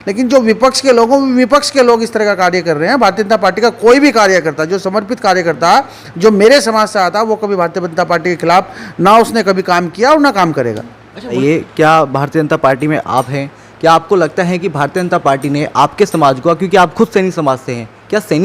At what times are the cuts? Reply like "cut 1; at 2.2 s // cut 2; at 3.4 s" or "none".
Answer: cut 1; at 11.4 s